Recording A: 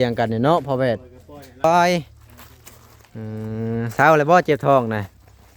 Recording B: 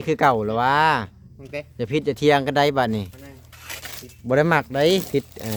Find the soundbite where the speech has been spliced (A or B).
A